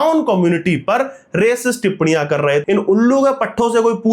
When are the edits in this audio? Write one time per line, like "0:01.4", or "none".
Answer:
0:02.6